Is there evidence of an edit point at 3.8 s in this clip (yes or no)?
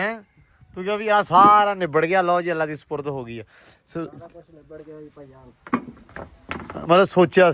no